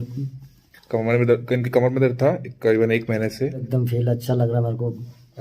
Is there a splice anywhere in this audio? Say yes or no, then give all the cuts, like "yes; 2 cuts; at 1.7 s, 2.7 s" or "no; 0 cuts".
yes; 1 cut; at 3.7 s